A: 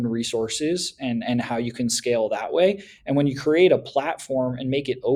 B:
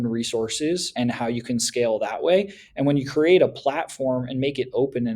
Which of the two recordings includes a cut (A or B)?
B